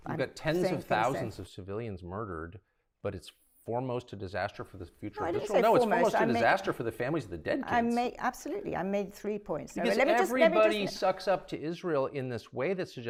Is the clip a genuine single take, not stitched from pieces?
yes; 0 cuts

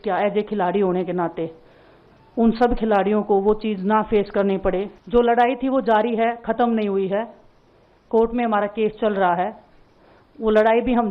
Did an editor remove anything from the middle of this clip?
yes; 1 cut; at 5.0 s

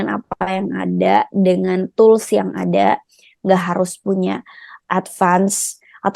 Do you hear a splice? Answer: no; 0 cuts

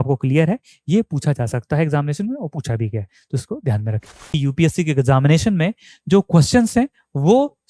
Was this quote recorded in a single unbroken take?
no; 1 cut; at 4.4 s

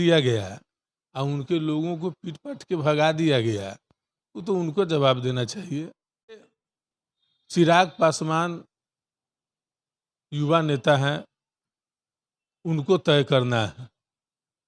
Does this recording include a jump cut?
yes; 1 cut; at 6.6 s

